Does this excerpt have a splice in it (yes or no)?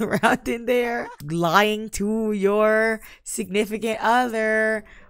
yes